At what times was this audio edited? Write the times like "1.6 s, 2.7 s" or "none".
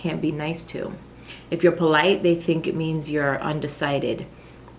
none

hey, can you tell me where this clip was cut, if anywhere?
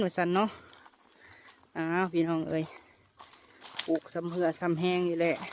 none

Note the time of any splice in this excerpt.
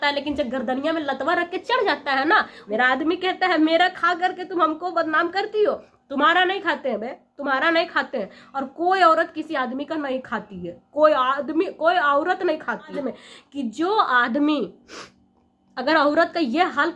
2.6 s, 13.0 s

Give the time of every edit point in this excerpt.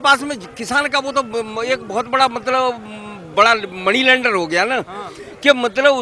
none

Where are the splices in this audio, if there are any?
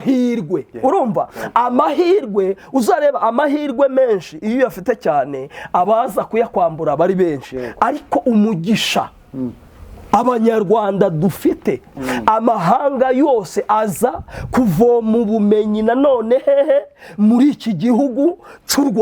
none

